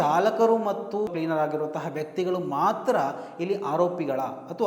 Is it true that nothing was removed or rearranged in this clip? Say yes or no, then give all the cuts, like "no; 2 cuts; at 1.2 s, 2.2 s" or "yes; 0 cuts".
no; 1 cut; at 1.1 s